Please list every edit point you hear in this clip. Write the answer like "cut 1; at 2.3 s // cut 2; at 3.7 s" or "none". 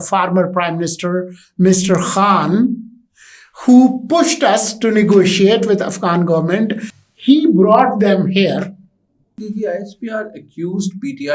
cut 1; at 6.9 s // cut 2; at 9.4 s